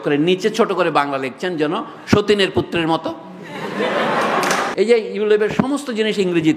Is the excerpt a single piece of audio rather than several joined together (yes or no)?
no